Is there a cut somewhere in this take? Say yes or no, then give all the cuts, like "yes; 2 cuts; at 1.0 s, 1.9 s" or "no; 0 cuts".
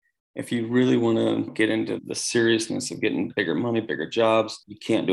yes; 1 cut; at 3.3 s